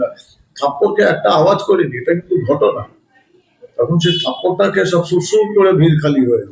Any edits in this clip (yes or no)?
no